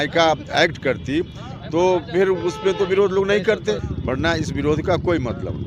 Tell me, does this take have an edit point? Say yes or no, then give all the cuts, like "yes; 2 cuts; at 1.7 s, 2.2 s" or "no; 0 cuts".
yes; 1 cut; at 3.9 s